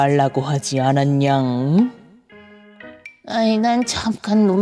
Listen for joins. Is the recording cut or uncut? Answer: uncut